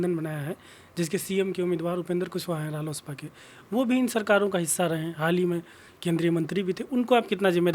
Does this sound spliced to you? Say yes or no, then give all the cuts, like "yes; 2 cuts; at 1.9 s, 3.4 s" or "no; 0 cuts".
no; 0 cuts